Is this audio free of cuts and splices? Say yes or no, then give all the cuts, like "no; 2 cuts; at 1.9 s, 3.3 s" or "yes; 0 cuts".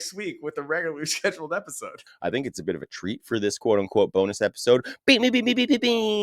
no; 1 cut; at 1.9 s